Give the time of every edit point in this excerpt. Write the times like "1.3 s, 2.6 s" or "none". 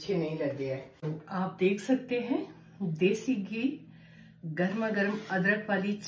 0.9 s